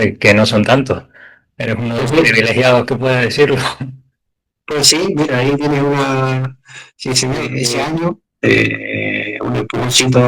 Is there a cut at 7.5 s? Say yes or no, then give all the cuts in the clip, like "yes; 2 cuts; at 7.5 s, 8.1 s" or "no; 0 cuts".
yes; 1 cut; at 7.5 s